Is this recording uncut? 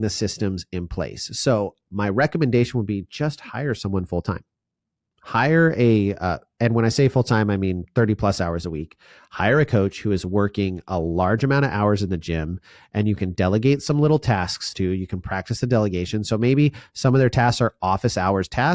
yes; 0 cuts

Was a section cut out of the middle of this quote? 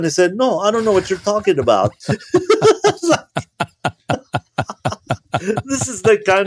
no; 0 cuts

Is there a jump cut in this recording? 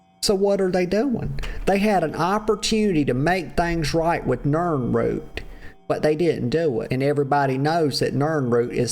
yes; 1 cut; at 6.9 s

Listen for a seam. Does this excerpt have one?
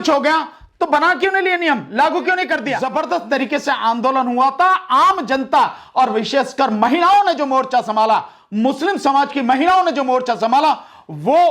yes; 1 cut; at 2.8 s

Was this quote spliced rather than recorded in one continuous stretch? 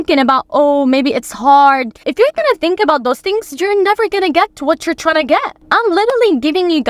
no; 0 cuts

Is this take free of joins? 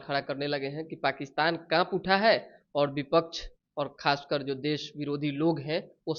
yes; 0 cuts

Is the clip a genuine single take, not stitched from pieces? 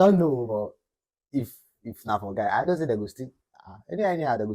yes; 0 cuts

